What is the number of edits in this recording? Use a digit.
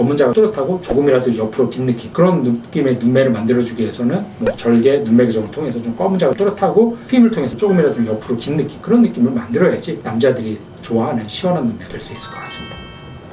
2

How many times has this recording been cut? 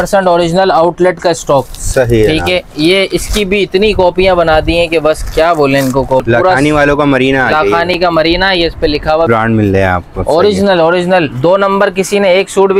2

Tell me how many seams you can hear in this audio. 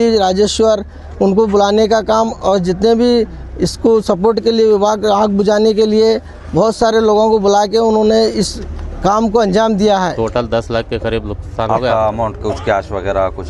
1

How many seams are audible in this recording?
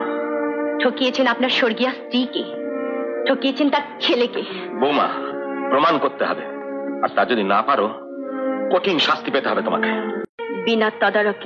1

